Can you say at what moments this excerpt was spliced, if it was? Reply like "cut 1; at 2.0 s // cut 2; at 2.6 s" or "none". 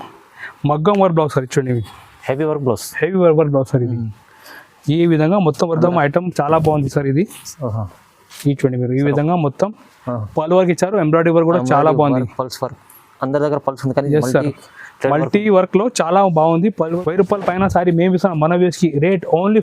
cut 1; at 5.8 s // cut 2; at 16.9 s